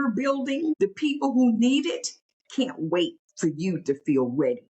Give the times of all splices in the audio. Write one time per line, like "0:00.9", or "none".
0:00.8
0:03.2